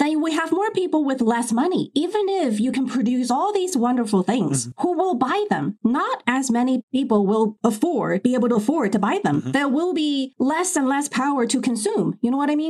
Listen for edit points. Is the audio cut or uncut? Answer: uncut